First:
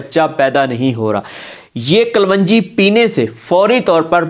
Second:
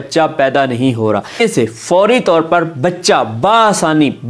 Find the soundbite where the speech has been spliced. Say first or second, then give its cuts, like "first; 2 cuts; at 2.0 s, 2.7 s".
second; 1 cut; at 1.4 s